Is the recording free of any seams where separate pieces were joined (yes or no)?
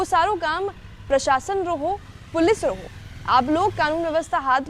yes